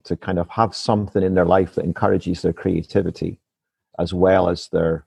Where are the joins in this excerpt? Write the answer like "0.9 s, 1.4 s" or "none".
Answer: none